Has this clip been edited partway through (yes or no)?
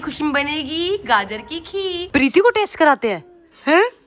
yes